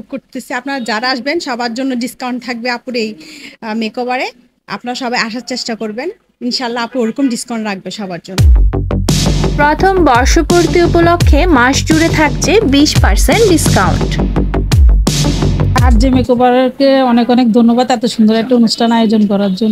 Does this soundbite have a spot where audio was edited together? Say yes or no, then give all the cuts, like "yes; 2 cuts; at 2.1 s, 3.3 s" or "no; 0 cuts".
no; 0 cuts